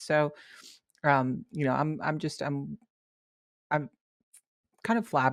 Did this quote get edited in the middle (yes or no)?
no